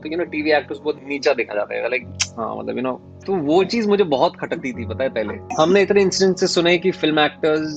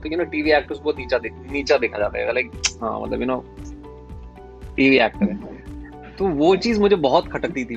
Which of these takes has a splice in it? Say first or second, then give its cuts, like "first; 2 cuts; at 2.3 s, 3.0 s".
first; 3 cuts; at 1.0 s, 3.1 s, 5.4 s